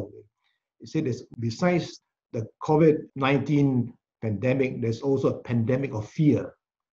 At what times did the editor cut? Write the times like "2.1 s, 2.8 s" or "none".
1.3 s, 2.0 s, 3.1 s